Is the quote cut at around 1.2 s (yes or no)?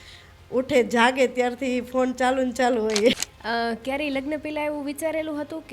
no